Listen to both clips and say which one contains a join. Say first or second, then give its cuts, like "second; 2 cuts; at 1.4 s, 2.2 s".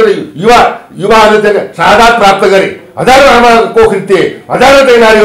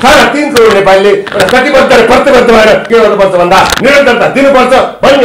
second; 1 cut; at 2.8 s